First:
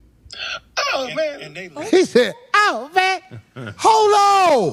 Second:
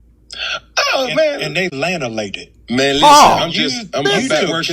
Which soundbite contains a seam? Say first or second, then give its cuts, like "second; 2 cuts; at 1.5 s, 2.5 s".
second; 1 cut; at 1.3 s